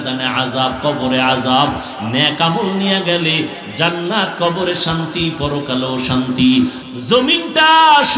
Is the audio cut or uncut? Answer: cut